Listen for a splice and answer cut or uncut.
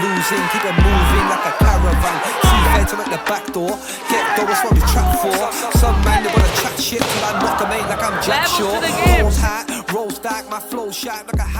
uncut